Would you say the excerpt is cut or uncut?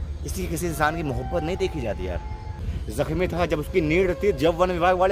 cut